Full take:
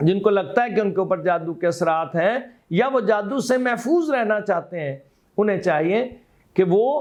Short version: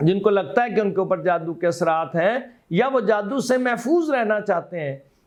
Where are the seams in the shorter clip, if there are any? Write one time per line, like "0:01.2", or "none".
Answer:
none